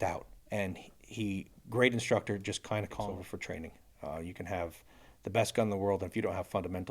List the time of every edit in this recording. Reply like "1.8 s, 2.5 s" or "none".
3.1 s

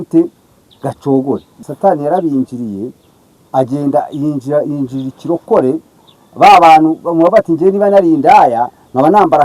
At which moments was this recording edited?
1.6 s

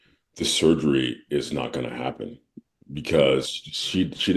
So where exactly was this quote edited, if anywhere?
none

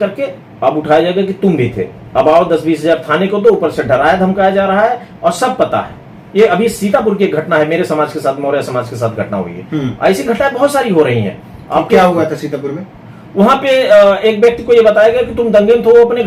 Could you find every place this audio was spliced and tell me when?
none

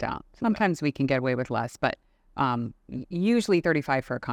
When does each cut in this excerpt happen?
none

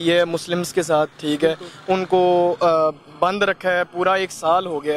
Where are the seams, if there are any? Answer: none

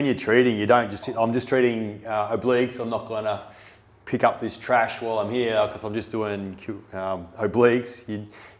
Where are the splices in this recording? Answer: 1.1 s

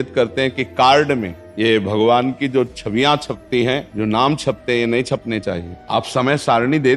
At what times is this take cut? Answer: 1.4 s, 3.9 s, 5.7 s

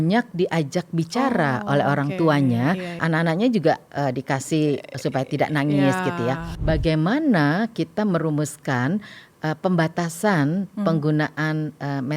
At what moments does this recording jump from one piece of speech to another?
3.0 s, 6.5 s

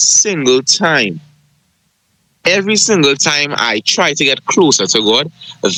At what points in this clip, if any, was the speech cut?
none

